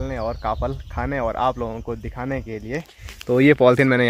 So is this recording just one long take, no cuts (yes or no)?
yes